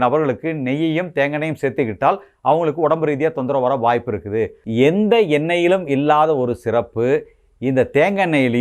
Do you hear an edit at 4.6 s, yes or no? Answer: yes